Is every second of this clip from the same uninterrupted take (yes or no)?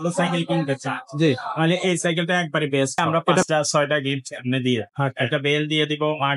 no